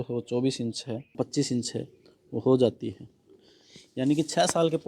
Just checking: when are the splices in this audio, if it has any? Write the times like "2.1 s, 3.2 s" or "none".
1.1 s